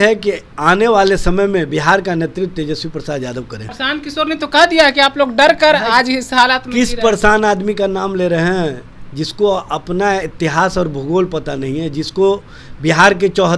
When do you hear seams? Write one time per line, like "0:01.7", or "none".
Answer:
0:03.7